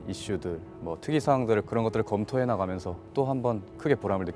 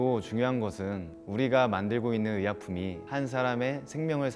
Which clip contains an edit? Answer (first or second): first